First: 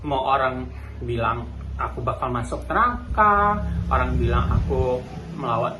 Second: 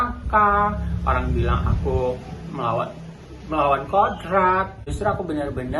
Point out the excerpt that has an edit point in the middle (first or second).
second